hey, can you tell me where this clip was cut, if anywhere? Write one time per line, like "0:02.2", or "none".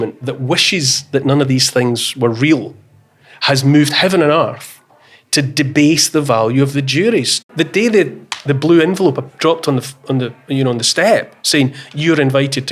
0:07.5